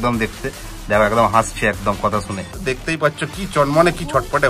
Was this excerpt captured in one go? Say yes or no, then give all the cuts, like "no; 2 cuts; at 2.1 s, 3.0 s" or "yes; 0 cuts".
no; 1 cut; at 2.6 s